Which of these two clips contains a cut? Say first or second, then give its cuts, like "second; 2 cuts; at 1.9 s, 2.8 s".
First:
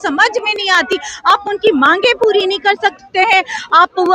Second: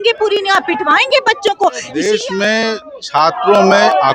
second; 1 cut; at 2.0 s